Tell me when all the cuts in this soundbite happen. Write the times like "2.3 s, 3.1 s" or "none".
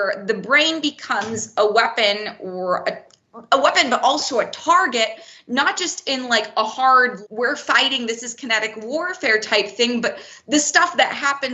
7.2 s